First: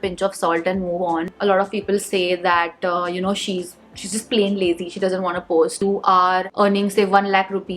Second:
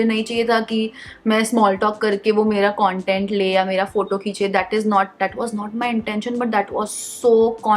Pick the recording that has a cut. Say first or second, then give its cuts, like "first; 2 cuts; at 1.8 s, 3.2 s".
first; 2 cuts; at 1.3 s, 5.8 s